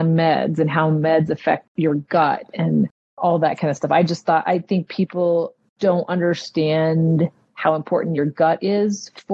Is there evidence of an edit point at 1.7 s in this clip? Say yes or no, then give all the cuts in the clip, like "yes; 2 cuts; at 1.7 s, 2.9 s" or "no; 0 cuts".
yes; 2 cuts; at 1.7 s, 5.7 s